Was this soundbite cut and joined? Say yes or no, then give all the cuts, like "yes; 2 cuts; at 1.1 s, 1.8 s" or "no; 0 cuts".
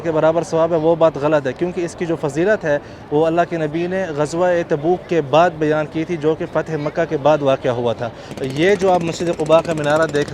yes; 1 cut; at 8.3 s